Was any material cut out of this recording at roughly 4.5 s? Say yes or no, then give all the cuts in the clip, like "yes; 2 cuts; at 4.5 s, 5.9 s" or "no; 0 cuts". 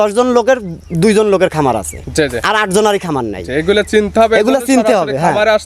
no; 0 cuts